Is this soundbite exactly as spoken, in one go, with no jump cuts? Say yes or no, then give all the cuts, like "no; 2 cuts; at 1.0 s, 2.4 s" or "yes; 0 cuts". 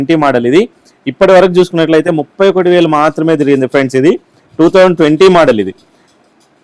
yes; 0 cuts